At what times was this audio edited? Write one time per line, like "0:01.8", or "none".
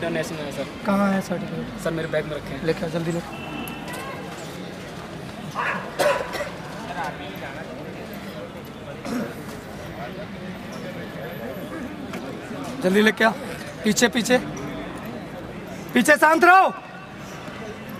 none